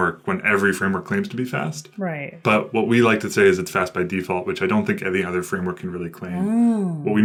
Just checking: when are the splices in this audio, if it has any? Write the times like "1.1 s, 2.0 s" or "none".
none